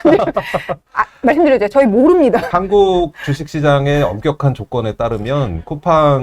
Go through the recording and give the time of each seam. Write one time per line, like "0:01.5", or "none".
0:02.5